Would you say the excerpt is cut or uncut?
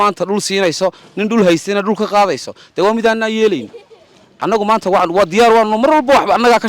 uncut